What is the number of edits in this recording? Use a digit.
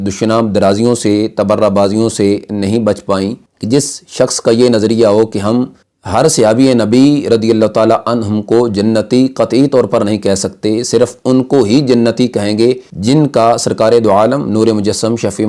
0